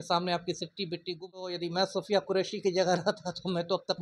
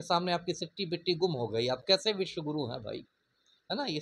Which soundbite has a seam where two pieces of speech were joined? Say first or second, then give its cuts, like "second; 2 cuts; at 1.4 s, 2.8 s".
first; 1 cut; at 1.5 s